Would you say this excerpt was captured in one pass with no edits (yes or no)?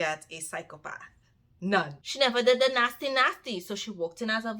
no